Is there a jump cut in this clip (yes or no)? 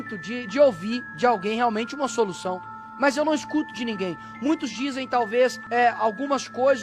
yes